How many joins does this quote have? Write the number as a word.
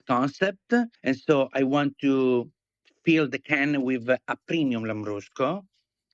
one